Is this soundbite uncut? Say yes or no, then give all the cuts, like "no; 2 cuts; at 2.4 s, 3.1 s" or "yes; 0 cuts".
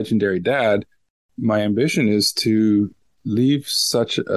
no; 1 cut; at 1.2 s